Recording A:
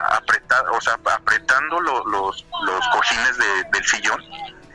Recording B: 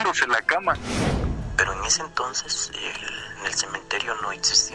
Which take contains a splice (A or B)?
B